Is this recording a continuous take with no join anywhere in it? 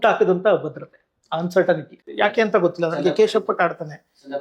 no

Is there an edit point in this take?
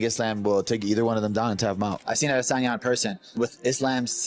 yes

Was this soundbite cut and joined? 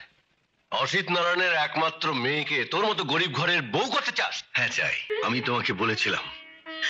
yes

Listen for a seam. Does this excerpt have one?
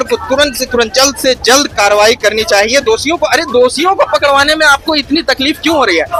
no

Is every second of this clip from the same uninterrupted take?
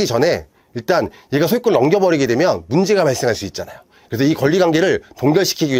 yes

